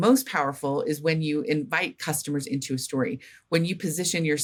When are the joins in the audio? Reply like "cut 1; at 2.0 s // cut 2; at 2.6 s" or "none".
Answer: none